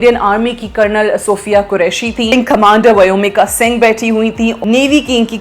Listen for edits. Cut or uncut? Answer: cut